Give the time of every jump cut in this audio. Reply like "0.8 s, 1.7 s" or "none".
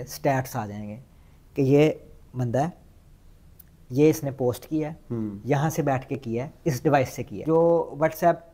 7.4 s